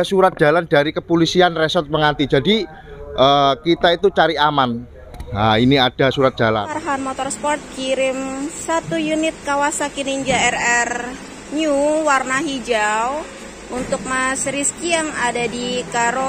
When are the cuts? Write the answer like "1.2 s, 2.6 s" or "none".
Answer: 6.7 s